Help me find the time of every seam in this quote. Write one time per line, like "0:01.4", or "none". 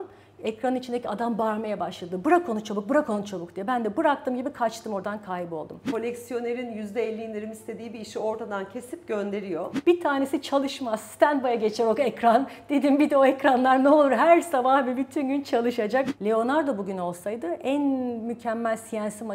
0:05.9
0:09.7
0:16.1